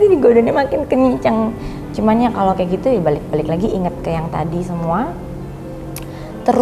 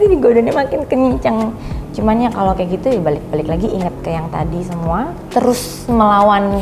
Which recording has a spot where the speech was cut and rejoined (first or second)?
second